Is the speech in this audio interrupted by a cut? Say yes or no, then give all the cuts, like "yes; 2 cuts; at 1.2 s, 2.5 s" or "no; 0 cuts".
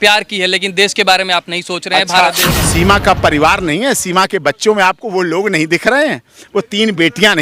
yes; 1 cut; at 2.5 s